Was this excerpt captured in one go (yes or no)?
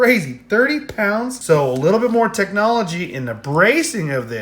no